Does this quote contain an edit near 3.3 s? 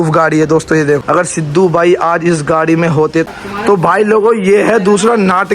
yes; 2 cuts; at 1.0 s, 3.3 s

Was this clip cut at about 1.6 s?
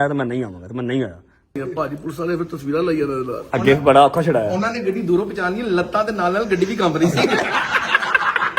yes; 2 cuts; at 1.6 s, 7.5 s

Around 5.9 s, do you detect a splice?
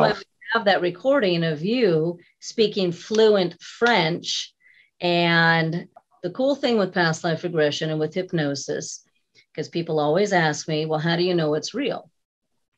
yes; 1 cut; at 5.9 s

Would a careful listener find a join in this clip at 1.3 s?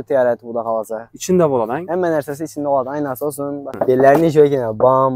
no; 1 cut; at 3.7 s

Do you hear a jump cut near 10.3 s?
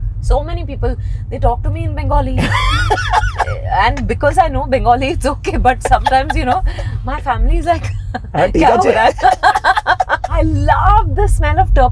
yes; 1 cut; at 10.3 s

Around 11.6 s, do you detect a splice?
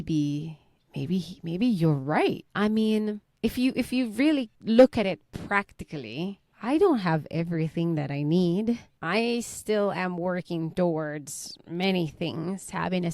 no; 5 cuts; at 2.5 s, 3.3 s, 4.5 s, 6.5 s, 8.9 s

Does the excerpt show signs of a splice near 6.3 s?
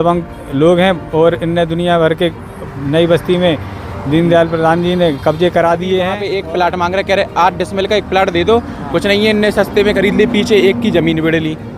yes; 1 cut; at 6.3 s

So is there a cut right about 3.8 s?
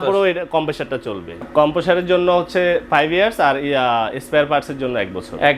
no; 1 cut; at 1.4 s

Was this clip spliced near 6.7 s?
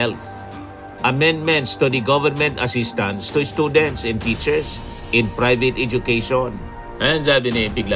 yes; 1 cut; at 6.7 s

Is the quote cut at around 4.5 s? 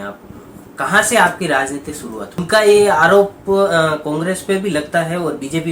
no; 1 cut; at 2.4 s

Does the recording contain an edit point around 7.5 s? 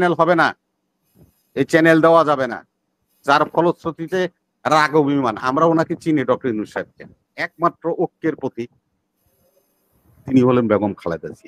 yes; 1 cut; at 7.5 s

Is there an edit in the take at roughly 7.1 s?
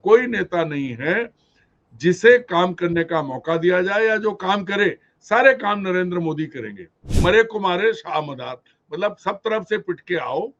yes; 1 cut; at 7.1 s

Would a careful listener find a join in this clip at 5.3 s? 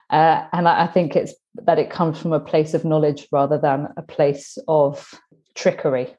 yes; 1 cut; at 5.3 s

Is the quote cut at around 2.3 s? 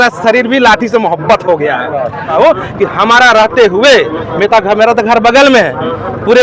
yes; 1 cut; at 2.3 s

